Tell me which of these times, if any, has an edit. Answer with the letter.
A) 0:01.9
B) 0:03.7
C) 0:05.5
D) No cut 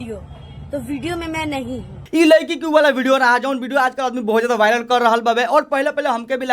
A